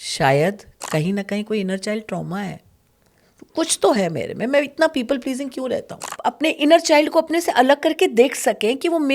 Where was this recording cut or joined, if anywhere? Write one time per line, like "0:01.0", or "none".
0:06.1